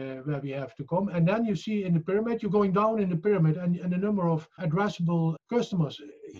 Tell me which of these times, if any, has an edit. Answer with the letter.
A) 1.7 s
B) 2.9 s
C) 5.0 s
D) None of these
C